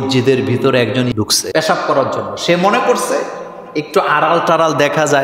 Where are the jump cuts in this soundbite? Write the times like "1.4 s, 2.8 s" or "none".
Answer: 1.1 s